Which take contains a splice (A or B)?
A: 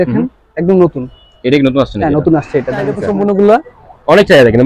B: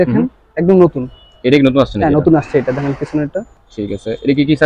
A